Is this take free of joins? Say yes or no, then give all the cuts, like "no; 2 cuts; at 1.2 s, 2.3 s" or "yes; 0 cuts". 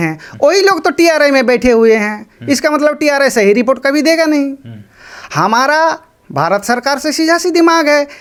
yes; 0 cuts